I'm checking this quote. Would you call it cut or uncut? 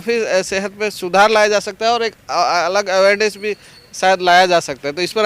uncut